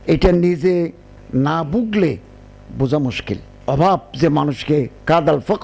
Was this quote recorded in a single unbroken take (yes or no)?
no